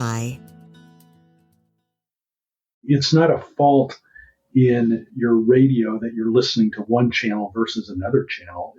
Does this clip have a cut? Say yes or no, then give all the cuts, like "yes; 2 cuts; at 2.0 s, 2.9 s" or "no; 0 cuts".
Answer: yes; 1 cut; at 2.7 s